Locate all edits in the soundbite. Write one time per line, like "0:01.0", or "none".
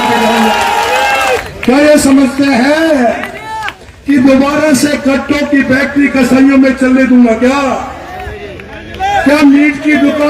0:01.4